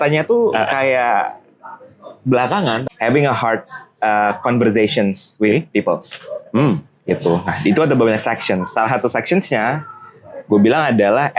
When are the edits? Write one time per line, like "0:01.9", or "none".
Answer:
0:02.8